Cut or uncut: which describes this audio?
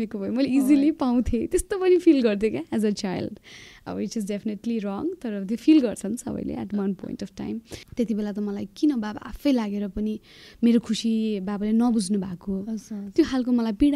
cut